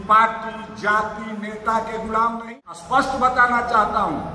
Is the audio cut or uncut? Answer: cut